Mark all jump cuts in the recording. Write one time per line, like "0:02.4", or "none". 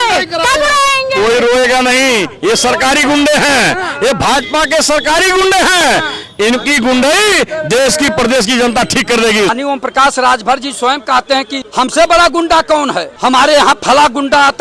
0:09.5
0:11.6
0:13.1